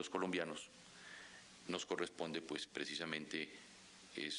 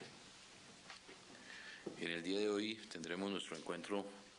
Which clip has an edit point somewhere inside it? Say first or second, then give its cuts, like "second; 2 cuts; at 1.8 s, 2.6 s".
first; 1 cut; at 1.8 s